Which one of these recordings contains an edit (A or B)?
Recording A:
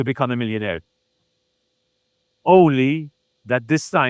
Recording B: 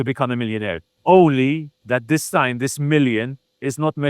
B